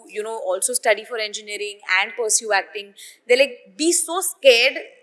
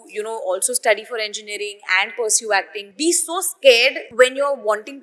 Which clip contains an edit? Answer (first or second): second